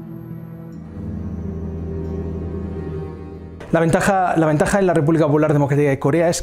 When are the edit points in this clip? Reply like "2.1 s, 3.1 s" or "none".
none

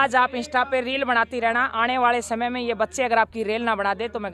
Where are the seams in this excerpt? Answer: none

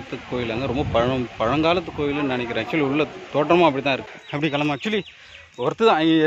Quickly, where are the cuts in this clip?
4.1 s

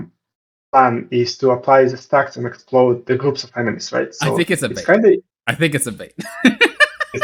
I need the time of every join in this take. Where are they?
none

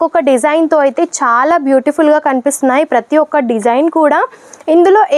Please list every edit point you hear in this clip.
none

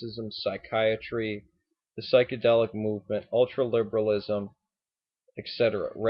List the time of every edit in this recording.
2.4 s

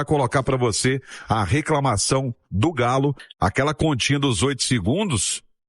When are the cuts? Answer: 3.2 s

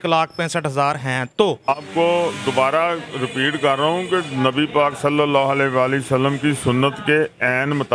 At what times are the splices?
1.8 s

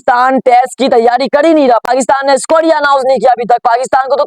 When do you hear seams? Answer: 1.8 s

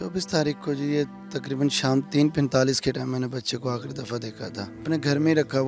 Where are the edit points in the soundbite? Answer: 4.7 s

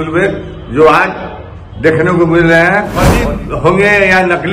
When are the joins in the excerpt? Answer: 3.0 s

